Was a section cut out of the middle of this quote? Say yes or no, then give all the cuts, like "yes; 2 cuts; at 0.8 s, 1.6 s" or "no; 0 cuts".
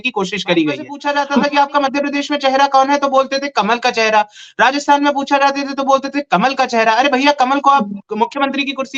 yes; 1 cut; at 0.9 s